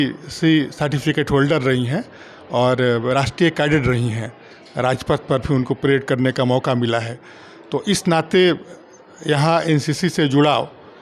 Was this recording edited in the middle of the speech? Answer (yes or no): no